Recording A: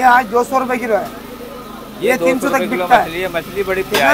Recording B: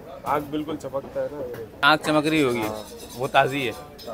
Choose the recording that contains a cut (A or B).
B